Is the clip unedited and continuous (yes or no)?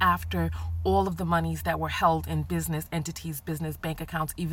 yes